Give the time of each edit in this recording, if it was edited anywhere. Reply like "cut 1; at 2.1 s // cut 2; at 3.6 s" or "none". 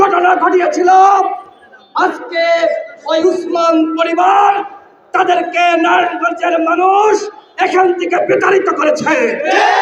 none